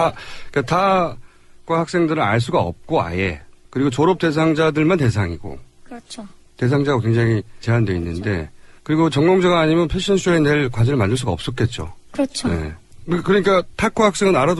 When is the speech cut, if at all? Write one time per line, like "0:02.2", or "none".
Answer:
none